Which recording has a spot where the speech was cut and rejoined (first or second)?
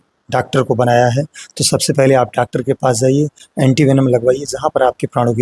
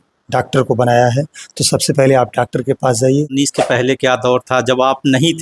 second